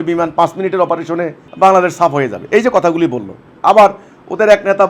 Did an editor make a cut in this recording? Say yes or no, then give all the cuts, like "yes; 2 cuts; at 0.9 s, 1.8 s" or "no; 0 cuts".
yes; 1 cut; at 1.4 s